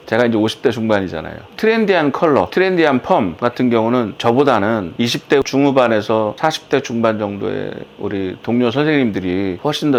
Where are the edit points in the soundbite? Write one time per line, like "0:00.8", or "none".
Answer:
none

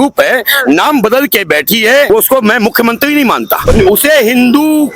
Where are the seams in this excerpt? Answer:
0:03.5

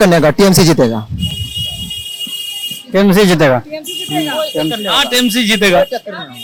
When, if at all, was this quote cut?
none

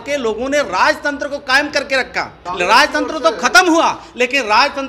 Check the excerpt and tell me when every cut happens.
0:02.4

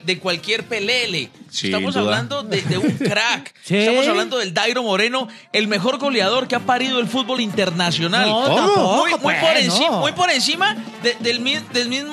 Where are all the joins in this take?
none

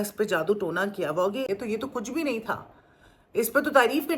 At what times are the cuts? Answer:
0:01.5

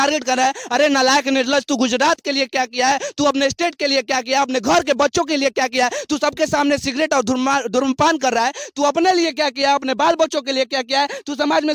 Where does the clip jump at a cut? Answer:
none

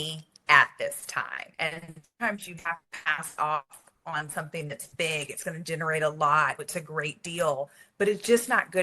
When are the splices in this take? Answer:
0:01.4

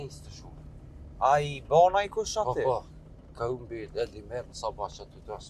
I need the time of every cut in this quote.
none

